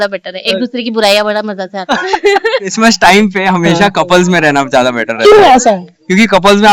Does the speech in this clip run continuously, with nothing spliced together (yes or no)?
no